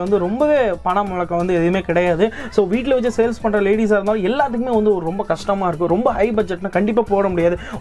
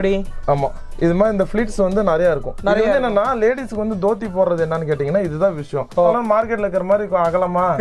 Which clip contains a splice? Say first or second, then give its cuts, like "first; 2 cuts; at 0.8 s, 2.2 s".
second; 1 cut; at 6.1 s